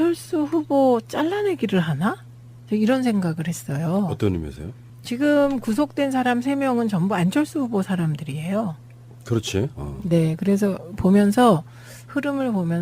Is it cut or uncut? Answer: cut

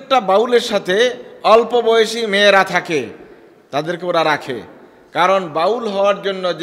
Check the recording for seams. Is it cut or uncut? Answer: uncut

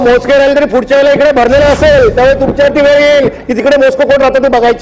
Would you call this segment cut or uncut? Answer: uncut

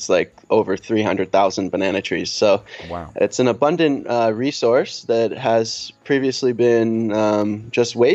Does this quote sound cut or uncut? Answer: uncut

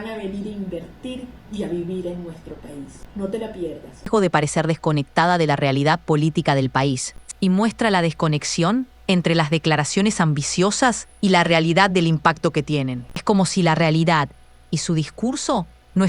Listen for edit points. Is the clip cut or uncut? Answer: cut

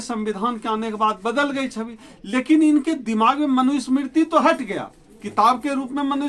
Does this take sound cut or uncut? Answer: uncut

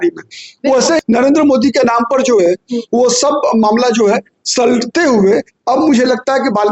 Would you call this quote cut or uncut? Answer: cut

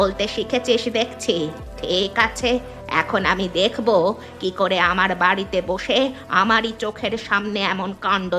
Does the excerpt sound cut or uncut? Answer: uncut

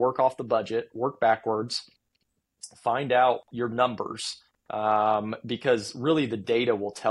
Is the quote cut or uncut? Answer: uncut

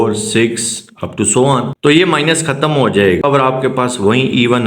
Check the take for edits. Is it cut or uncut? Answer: cut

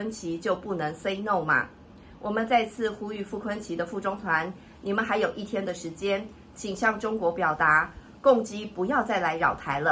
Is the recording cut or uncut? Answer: uncut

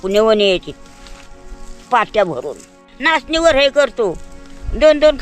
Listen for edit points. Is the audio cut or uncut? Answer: cut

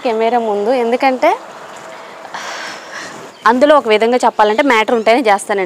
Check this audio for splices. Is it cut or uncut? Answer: cut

